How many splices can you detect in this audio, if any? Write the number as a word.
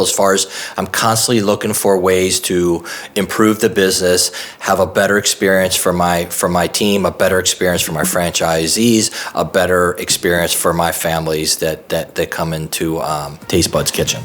one